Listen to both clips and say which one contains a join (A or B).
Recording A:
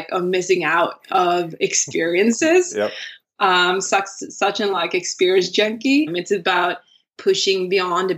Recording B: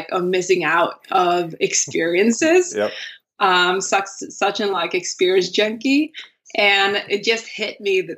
A